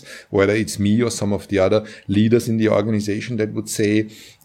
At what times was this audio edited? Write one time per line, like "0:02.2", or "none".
0:02.8